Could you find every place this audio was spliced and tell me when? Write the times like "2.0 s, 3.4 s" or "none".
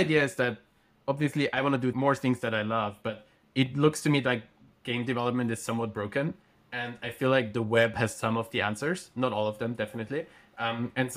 2.0 s